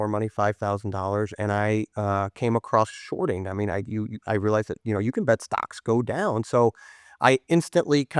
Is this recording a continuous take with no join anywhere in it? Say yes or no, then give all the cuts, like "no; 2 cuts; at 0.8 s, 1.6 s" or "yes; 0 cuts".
yes; 0 cuts